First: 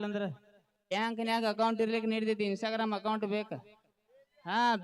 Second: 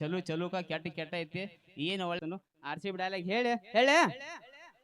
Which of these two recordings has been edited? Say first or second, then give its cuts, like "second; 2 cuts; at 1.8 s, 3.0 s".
second; 1 cut; at 2.2 s